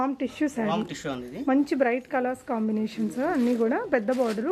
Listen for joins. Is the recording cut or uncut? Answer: uncut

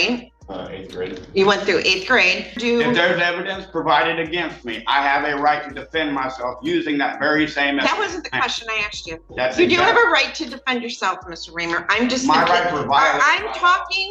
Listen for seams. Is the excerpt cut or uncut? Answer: cut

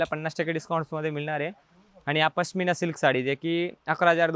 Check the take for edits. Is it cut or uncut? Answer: uncut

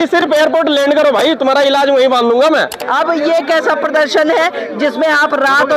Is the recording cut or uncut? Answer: cut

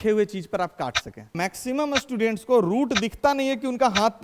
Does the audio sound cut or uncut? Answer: cut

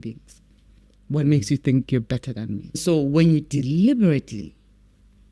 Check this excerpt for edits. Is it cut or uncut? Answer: cut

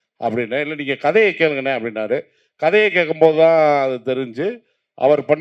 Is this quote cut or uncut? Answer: uncut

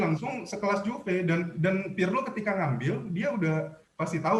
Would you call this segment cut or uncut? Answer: uncut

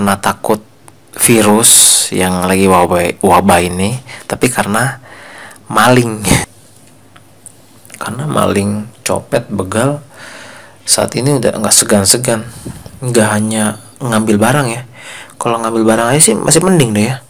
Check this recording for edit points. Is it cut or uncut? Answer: cut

